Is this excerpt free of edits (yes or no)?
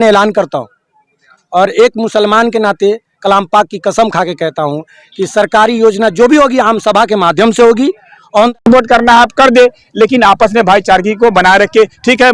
no